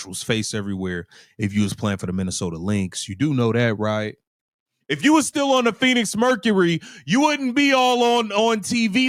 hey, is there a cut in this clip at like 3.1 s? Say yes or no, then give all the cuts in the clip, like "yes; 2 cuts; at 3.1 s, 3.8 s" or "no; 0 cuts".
no; 0 cuts